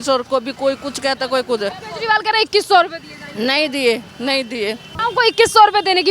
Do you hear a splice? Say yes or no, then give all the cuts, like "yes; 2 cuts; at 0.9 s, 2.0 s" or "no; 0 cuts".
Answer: yes; 1 cut; at 4.9 s